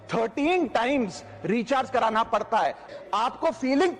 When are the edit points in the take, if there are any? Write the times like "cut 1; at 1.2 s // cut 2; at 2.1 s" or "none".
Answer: cut 1; at 2.9 s